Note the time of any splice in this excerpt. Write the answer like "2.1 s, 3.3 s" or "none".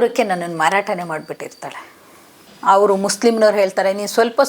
2.0 s